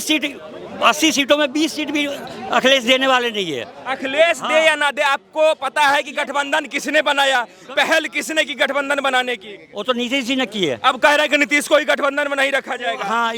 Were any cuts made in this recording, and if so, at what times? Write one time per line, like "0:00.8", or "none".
none